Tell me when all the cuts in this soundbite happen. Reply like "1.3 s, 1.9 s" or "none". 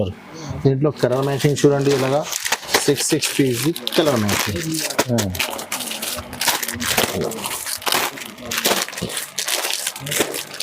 none